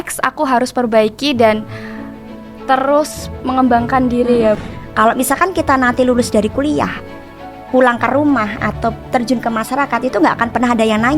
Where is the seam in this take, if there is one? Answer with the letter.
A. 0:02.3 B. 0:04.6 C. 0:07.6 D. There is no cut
B